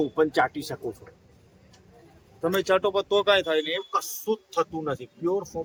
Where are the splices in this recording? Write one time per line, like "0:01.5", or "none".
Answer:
none